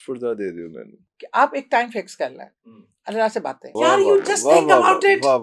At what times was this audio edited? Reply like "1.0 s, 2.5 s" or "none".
1.1 s, 3.7 s